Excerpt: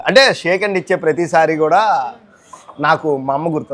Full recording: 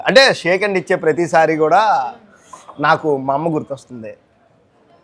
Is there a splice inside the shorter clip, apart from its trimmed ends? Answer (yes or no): no